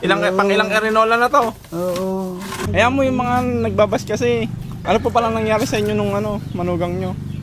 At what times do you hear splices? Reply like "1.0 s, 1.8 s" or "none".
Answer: 2.5 s, 4.7 s

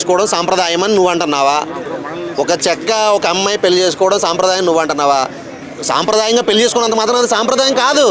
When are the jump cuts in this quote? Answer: none

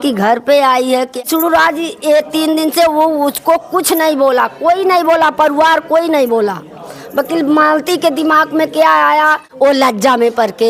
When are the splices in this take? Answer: 1.2 s, 9.4 s

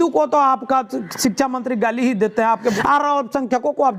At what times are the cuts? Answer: 2.8 s

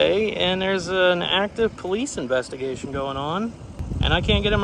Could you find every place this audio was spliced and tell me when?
3.7 s

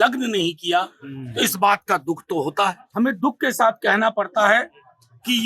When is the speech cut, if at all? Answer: 2.8 s

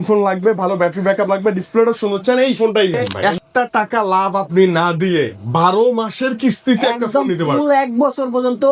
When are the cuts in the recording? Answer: 3.1 s

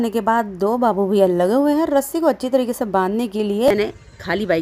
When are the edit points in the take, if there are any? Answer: 3.7 s

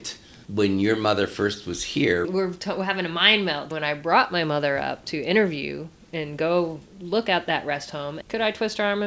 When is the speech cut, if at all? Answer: 2.3 s, 3.7 s

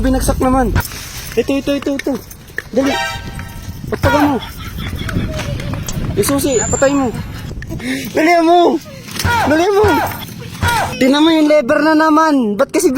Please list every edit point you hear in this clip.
0.8 s, 7.8 s, 10.9 s

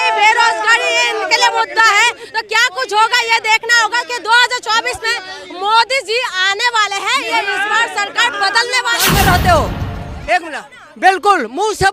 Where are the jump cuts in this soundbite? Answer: 9.1 s

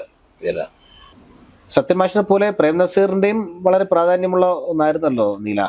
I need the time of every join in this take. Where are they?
1.1 s

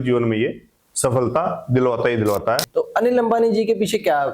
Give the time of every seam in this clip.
2.7 s

